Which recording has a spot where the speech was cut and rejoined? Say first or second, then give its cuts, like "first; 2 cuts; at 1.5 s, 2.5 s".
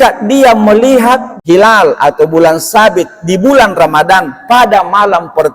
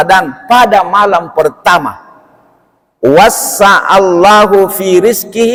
first; 1 cut; at 1.3 s